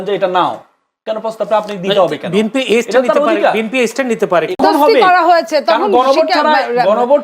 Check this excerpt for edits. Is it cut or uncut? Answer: cut